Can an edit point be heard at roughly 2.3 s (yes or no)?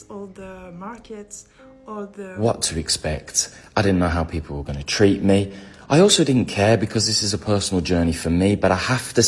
yes